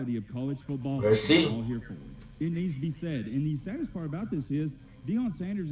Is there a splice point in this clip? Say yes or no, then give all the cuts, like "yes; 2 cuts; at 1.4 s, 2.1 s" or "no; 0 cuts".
no; 0 cuts